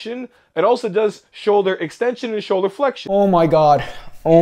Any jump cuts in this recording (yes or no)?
yes